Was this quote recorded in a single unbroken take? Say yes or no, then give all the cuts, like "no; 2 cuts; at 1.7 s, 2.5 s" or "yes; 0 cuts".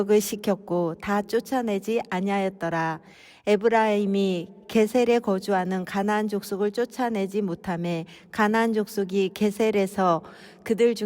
no; 1 cut; at 3.0 s